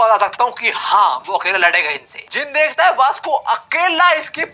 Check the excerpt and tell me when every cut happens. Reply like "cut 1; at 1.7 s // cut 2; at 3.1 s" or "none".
cut 1; at 2.2 s